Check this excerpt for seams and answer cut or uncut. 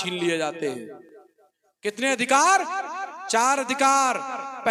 uncut